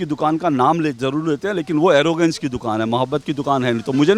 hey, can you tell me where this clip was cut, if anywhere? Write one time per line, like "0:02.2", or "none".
none